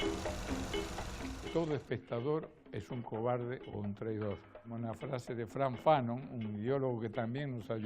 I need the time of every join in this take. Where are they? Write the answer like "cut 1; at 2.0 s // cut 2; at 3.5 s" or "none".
cut 1; at 5.3 s

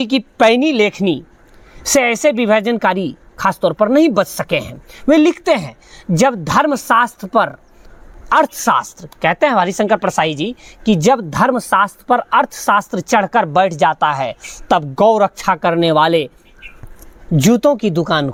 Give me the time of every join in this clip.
none

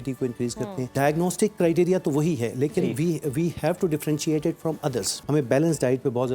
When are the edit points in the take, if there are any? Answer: cut 1; at 0.9 s // cut 2; at 5.2 s

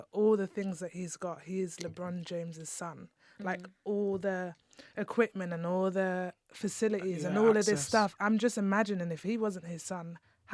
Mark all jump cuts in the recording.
none

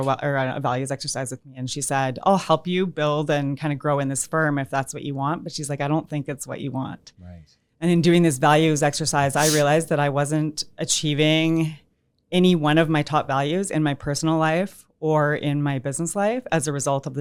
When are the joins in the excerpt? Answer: none

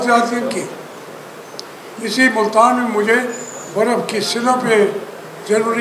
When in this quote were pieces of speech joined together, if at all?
none

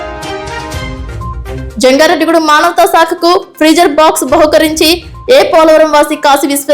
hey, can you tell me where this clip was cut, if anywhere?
cut 1; at 0.8 s // cut 2; at 1.6 s

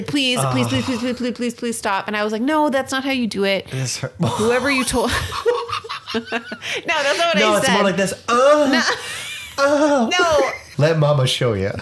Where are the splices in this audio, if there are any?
cut 1; at 10.6 s

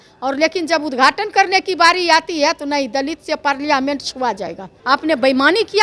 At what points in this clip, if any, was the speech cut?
cut 1; at 4.7 s

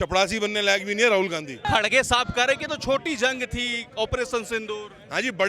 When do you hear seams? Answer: cut 1; at 1.7 s

